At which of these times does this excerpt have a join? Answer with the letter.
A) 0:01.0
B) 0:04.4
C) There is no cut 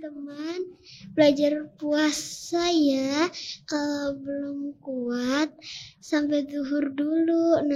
C